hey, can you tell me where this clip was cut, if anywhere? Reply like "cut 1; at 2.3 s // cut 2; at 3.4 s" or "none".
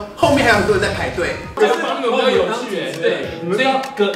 cut 1; at 1.6 s